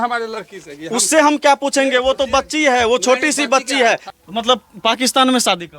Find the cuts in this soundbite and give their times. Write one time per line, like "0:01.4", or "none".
0:04.1